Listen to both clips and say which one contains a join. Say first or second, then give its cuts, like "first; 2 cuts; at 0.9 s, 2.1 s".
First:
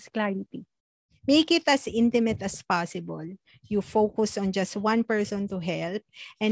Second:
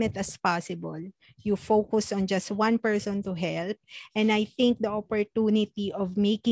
first; 1 cut; at 1.1 s